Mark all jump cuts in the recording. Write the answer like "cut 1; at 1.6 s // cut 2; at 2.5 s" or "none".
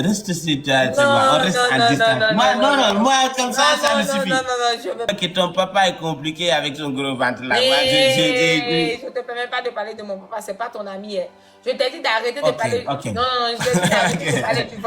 cut 1; at 5.1 s